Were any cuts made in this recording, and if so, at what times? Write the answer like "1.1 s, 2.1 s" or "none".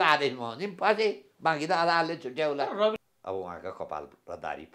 3.0 s